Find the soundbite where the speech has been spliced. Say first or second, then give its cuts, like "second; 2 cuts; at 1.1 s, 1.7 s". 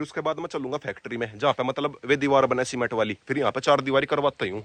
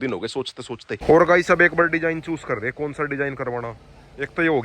second; 1 cut; at 0.9 s